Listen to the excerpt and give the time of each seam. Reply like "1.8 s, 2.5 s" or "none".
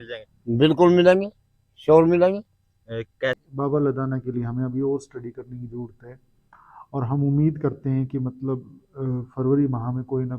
3.4 s